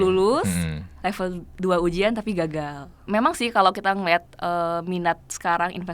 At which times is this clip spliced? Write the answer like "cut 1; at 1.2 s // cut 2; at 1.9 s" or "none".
cut 1; at 3.0 s

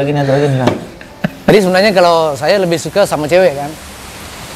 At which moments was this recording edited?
cut 1; at 1.5 s

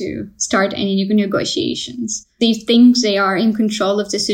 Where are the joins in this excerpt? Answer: cut 1; at 2.4 s

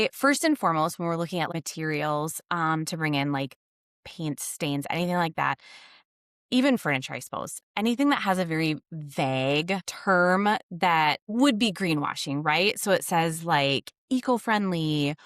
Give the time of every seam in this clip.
cut 1; at 1.5 s // cut 2; at 9.9 s // cut 3; at 11.2 s

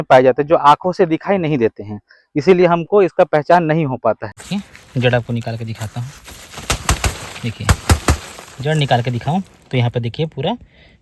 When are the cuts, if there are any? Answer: cut 1; at 4.3 s

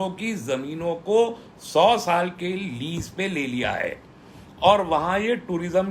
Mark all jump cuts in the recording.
none

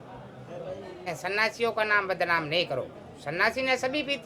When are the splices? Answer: cut 1; at 1.1 s

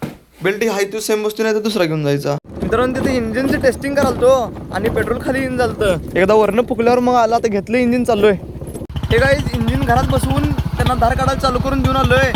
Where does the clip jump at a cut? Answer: none

